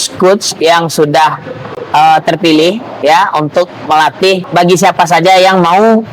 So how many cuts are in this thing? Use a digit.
1